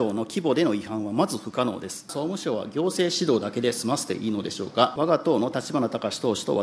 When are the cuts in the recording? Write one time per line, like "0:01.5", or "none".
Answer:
0:02.1
0:04.9